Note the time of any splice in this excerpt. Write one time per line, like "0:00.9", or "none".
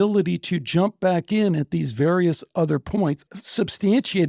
0:03.3